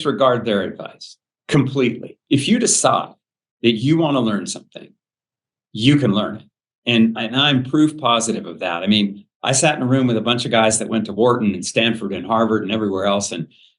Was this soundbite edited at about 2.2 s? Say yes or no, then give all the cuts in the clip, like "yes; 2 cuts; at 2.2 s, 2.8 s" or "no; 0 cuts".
yes; 1 cut; at 2.2 s